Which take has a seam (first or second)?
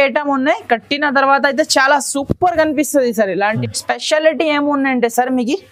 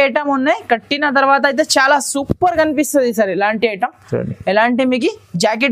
first